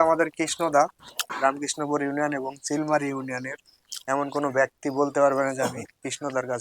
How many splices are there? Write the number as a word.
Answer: one